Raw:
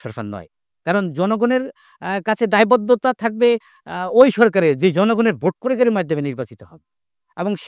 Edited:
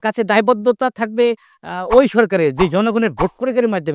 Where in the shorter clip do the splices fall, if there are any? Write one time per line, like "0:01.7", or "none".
none